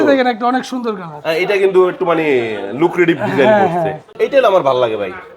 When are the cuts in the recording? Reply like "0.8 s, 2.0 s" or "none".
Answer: 4.1 s